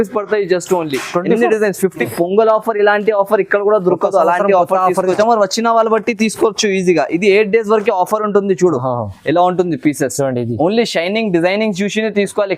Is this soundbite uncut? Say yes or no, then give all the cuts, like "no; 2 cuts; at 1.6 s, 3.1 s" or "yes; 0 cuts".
no; 2 cuts; at 2.1 s, 5.2 s